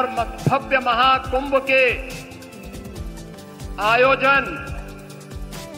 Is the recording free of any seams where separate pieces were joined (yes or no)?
no